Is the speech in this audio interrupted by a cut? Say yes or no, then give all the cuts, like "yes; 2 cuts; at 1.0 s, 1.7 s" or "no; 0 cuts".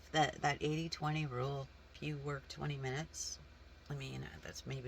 yes; 1 cut; at 1.9 s